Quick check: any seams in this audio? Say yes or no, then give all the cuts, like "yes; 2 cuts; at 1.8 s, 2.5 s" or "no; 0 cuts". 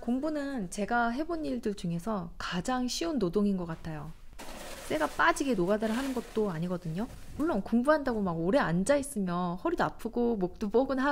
no; 0 cuts